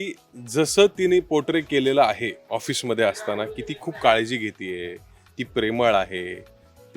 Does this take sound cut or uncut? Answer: cut